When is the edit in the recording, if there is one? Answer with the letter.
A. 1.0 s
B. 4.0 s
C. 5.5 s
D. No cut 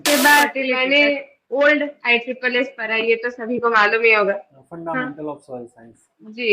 D